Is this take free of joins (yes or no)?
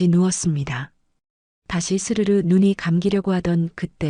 yes